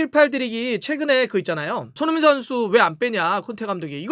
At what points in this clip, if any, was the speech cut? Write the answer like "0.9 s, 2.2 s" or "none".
1.9 s